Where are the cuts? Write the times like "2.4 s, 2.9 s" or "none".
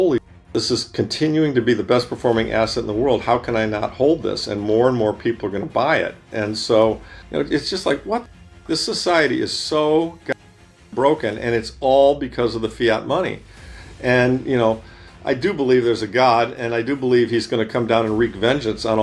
7.1 s